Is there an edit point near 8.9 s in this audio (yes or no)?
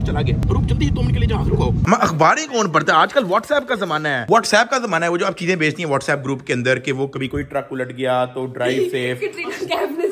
no